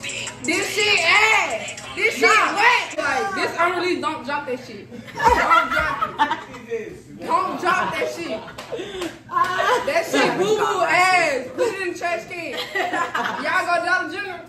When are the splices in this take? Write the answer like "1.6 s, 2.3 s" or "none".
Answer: 3.0 s